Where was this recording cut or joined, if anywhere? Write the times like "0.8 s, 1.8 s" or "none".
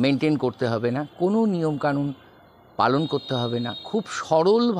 none